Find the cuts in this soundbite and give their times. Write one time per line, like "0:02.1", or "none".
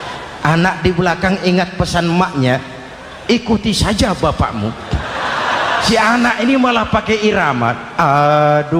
0:05.9